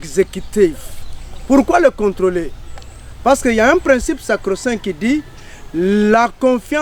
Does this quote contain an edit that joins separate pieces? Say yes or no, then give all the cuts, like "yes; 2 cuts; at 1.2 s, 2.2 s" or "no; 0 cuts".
no; 0 cuts